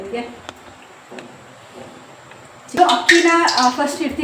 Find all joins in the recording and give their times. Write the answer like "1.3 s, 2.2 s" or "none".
2.7 s